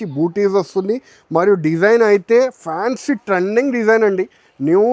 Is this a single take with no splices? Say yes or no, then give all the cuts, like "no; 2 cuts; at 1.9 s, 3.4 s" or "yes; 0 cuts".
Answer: yes; 0 cuts